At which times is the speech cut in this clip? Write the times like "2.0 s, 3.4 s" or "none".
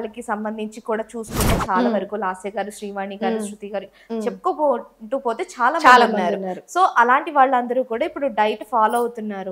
none